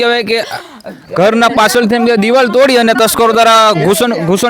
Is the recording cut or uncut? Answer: uncut